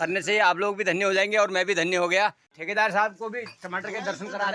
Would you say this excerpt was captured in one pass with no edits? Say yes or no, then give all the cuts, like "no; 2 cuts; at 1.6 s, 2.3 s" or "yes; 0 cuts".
no; 1 cut; at 2.5 s